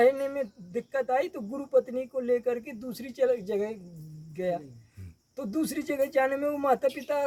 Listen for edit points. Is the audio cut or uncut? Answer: uncut